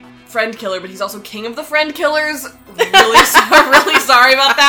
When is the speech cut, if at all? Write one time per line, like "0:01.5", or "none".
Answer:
none